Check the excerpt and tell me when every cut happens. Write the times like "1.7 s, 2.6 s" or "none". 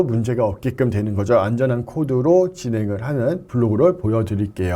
3.5 s

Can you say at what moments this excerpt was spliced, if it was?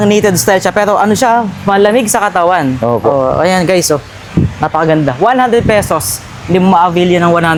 none

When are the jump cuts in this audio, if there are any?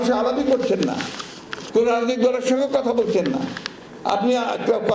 none

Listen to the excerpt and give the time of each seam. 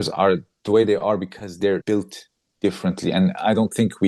1.8 s

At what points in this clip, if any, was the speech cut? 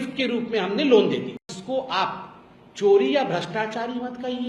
1.6 s

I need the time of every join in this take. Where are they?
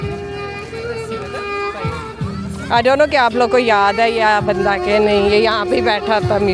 none

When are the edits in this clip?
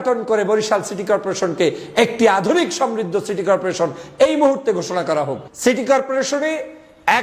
5.4 s

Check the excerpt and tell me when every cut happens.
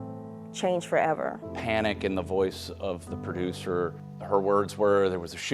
1.4 s, 4.1 s

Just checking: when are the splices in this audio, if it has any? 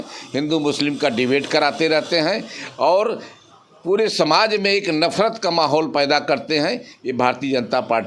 none

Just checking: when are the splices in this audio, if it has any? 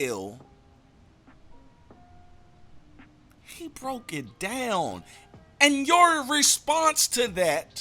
none

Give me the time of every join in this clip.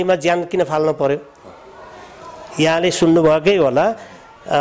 none

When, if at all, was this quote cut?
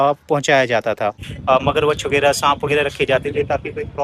1.3 s

